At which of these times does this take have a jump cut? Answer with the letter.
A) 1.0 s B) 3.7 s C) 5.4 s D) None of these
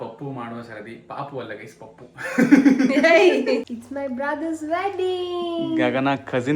B